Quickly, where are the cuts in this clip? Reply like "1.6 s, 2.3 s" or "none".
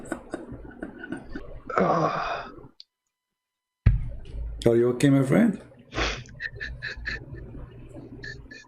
1.4 s